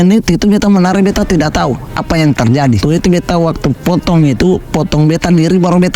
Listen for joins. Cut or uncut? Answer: cut